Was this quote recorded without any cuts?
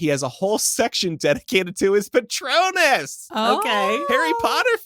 yes; 0 cuts

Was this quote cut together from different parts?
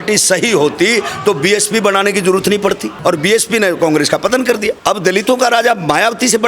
yes; 2 cuts; at 2.9 s, 4.8 s

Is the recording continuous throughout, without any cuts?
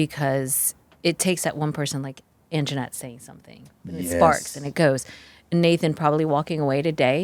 yes; 0 cuts

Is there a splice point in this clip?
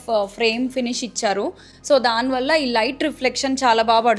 no; 0 cuts

